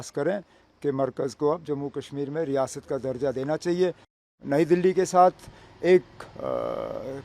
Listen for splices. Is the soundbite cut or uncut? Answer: cut